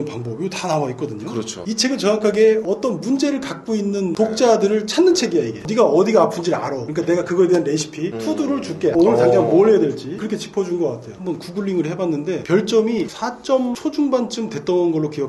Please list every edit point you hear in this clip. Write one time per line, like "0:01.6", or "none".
0:01.6
0:11.2